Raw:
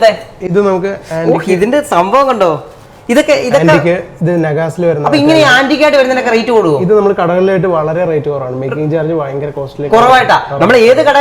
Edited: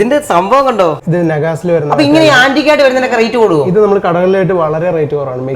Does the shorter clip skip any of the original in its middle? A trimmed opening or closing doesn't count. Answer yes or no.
yes